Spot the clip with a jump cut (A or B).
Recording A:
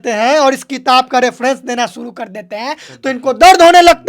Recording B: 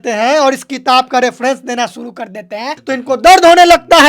B